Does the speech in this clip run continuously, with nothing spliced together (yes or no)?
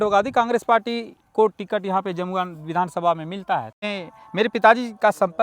no